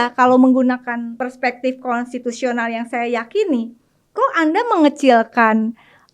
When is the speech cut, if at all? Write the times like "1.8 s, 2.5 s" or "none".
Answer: 1.1 s